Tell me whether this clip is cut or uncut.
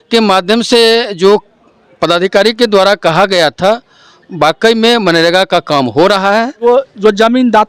cut